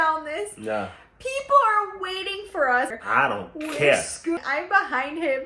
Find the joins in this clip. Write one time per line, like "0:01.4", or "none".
0:02.9
0:04.4